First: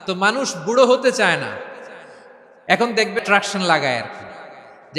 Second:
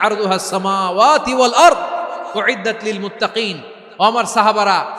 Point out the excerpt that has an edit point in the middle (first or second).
first